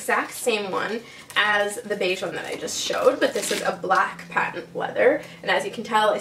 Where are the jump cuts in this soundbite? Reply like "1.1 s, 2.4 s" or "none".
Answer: none